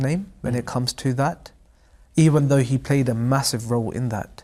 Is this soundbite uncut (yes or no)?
yes